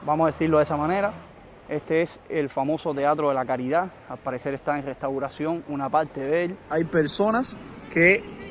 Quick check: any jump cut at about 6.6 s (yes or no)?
yes